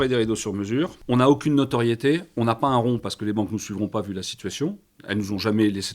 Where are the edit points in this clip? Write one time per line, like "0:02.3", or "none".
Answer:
0:01.0